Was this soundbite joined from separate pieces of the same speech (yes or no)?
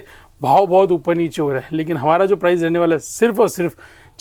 no